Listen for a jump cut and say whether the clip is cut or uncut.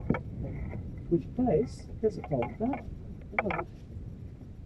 uncut